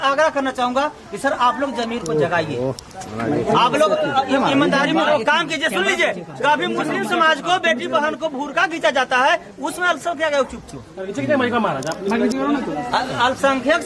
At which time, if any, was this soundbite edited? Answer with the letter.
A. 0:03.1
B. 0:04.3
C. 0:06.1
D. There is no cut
D